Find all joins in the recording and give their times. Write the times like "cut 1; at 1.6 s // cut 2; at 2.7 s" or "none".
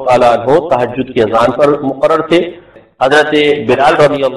cut 1; at 2.7 s